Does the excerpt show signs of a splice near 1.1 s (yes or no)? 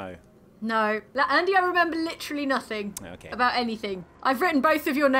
yes